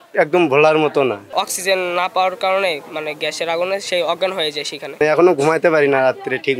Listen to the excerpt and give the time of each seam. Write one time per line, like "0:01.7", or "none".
0:01.3
0:05.0